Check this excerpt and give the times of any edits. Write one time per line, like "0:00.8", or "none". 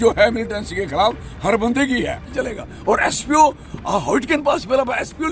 0:02.3